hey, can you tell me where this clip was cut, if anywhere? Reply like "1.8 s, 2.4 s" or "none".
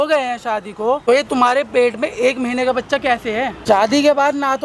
1.0 s, 3.5 s